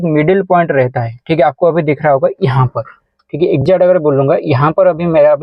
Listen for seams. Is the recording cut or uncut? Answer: uncut